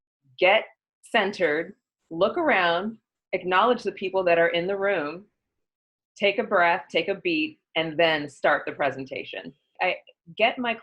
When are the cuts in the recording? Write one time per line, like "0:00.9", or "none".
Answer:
0:09.7